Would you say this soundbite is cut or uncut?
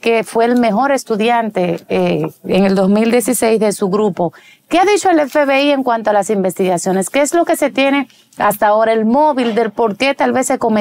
uncut